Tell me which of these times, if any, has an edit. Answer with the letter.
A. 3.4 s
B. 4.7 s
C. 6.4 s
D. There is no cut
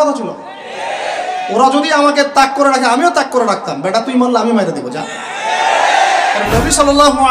C